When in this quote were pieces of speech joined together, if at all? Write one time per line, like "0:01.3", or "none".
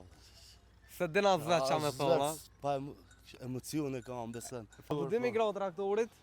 0:04.9